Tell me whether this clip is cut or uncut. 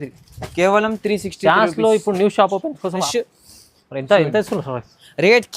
cut